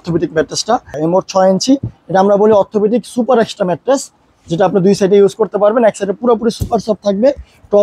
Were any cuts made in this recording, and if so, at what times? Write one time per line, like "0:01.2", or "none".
0:00.9